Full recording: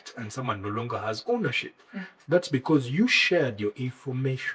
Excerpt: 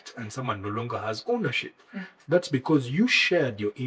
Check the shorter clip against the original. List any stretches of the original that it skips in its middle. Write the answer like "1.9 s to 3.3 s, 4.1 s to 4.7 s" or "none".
none